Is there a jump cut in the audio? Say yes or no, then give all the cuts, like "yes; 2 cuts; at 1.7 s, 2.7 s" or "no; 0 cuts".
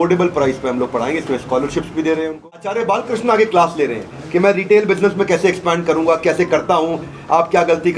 yes; 1 cut; at 2.8 s